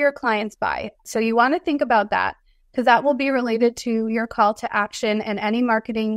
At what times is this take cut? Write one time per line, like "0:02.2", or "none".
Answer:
0:01.0